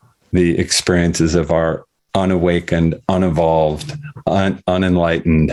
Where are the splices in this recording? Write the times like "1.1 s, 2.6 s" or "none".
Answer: none

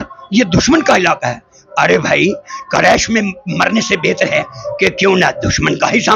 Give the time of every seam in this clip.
none

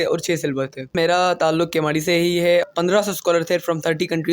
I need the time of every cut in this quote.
0.9 s, 2.7 s

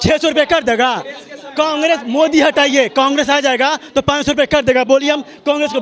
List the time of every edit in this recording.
none

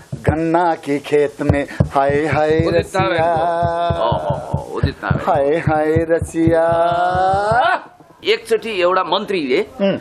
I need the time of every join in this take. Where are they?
8.2 s

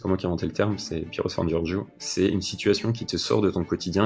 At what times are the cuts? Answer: none

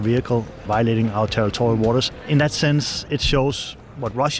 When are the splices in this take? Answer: 2.2 s

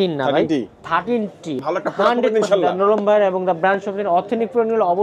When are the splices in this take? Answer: 1.6 s

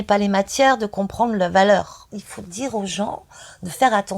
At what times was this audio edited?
2.1 s

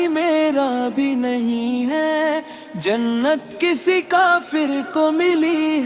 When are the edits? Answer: none

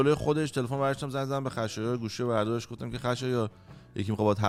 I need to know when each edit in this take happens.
none

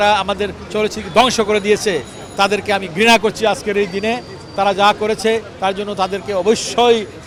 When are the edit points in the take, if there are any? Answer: none

